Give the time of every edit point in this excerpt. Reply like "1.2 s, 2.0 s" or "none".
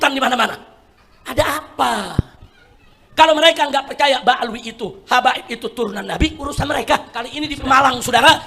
7.4 s